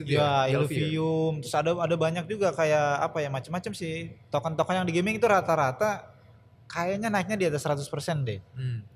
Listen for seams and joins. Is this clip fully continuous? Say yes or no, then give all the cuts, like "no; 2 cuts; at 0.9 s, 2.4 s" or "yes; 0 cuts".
yes; 0 cuts